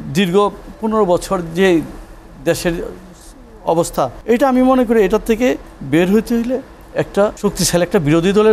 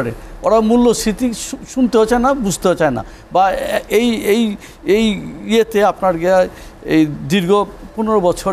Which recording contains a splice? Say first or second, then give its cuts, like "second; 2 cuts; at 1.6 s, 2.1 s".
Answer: first; 2 cuts; at 4.2 s, 7.4 s